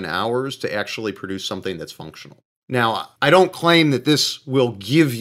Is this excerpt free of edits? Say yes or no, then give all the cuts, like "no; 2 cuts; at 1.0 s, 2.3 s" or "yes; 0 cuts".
no; 1 cut; at 3.1 s